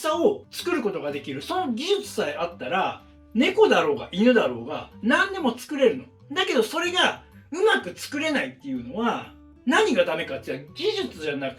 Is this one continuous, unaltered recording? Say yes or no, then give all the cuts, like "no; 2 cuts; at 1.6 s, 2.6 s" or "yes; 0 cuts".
yes; 0 cuts